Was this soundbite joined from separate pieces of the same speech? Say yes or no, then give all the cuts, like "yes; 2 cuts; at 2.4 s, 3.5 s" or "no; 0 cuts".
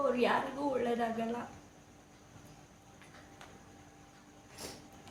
no; 0 cuts